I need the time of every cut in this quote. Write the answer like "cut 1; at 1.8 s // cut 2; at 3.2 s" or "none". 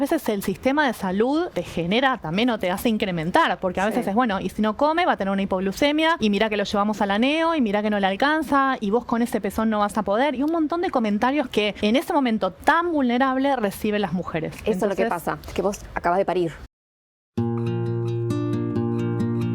cut 1; at 1.5 s // cut 2; at 6.2 s // cut 3; at 11.7 s // cut 4; at 15.4 s // cut 5; at 16.6 s